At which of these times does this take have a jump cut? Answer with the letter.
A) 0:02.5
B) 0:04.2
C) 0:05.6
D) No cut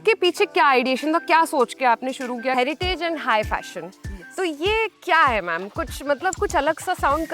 A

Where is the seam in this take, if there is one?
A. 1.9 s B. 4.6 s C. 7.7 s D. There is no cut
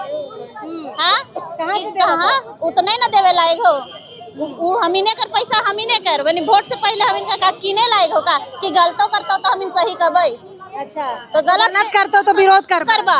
D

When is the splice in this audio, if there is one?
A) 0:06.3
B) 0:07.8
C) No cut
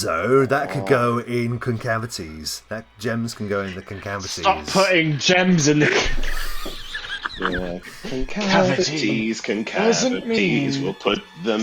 B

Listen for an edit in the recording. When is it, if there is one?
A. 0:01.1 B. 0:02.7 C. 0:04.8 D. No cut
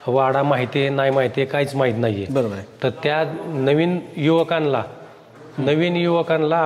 D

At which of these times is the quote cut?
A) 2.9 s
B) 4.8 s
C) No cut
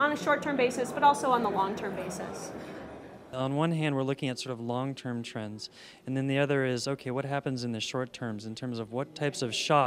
A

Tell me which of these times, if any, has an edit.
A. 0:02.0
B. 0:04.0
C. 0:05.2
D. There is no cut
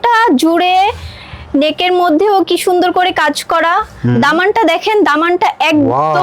D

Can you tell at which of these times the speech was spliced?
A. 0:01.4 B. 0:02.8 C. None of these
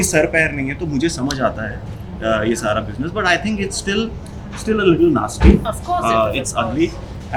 C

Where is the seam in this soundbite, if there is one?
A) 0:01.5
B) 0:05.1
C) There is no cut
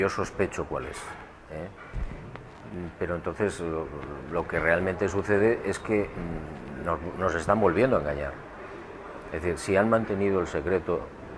B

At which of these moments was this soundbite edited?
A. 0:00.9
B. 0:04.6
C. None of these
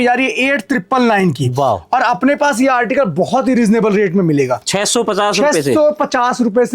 B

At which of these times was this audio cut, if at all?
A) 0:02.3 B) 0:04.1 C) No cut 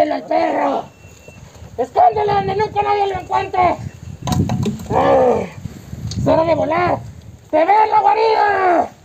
B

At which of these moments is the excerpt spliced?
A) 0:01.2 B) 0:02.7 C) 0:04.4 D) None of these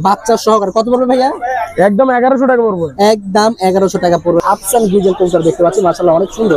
C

